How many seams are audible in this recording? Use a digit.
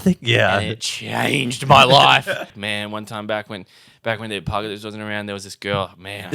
1